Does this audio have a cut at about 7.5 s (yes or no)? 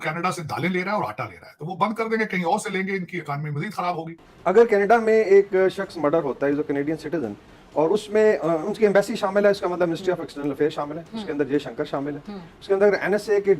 no